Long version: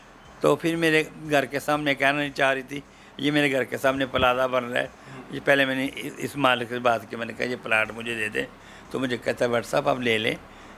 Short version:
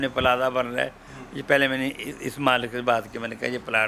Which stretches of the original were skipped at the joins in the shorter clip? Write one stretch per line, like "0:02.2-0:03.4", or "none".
none